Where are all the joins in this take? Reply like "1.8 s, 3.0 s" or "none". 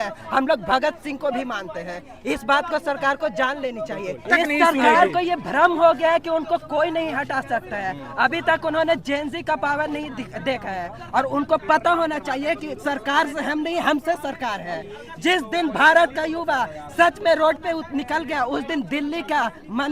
none